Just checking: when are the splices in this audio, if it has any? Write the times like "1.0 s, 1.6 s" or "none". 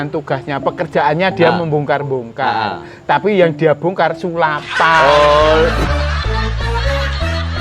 5.9 s